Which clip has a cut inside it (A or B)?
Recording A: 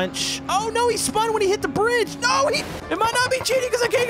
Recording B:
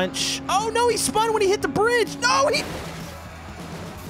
A